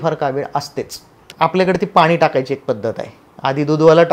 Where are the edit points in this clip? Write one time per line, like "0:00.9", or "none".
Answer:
0:01.2